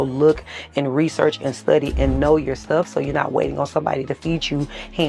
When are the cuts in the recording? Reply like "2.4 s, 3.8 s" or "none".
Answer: none